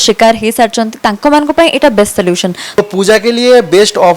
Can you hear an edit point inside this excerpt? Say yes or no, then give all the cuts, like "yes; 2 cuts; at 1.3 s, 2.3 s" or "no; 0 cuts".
yes; 1 cut; at 2.8 s